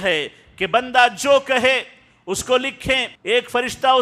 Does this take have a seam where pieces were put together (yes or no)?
yes